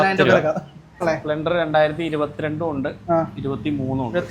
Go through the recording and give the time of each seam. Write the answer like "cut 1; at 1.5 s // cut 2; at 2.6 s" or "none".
cut 1; at 1.0 s